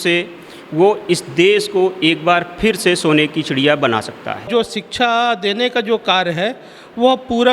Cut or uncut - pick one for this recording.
cut